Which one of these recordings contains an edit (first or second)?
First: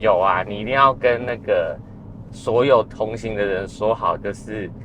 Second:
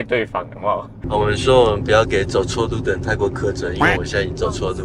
second